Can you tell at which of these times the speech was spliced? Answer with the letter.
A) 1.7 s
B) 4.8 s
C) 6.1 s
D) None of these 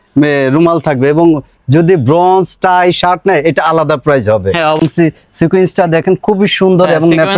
B